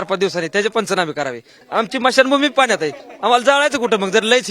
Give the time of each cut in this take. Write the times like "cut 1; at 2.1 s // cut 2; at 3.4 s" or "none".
cut 1; at 1.6 s